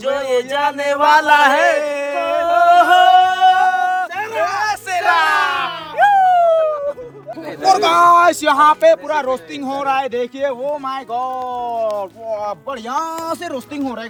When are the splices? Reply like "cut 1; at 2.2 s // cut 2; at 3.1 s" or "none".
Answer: none